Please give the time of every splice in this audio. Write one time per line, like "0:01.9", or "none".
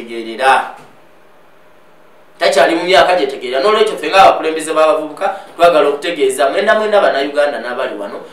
none